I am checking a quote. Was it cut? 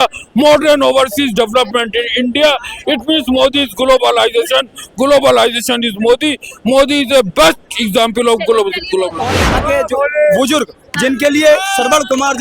yes; 1 cut; at 9.4 s

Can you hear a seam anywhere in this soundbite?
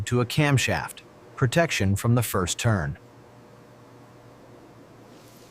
no; 0 cuts

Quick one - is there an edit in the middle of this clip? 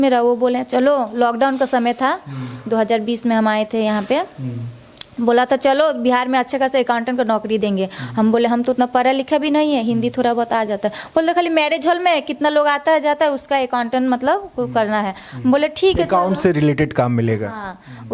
no; 0 cuts

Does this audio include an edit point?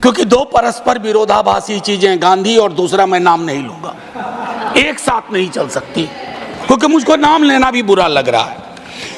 no; 0 cuts

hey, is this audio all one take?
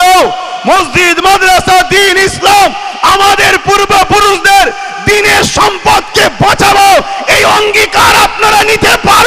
yes; 0 cuts

